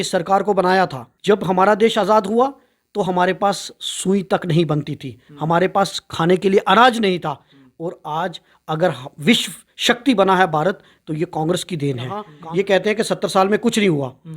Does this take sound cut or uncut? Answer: cut